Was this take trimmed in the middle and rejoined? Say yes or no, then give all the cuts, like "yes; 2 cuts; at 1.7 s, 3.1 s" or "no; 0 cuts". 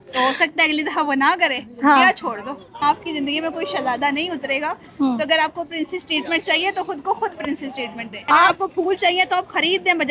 yes; 2 cuts; at 2.8 s, 8.1 s